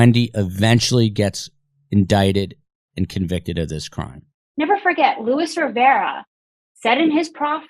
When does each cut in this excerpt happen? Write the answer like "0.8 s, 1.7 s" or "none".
4.4 s